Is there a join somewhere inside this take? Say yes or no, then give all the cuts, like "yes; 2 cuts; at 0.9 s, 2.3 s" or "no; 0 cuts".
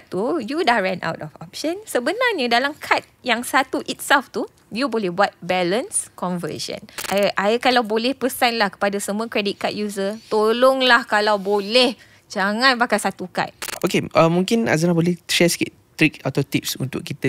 yes; 2 cuts; at 6.9 s, 13.6 s